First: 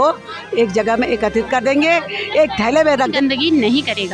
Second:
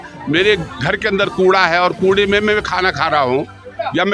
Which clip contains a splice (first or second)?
first